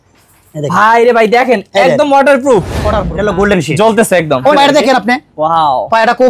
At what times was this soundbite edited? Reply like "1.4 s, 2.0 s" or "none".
3.1 s, 4.5 s